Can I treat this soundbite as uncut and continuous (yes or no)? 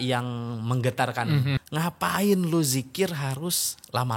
no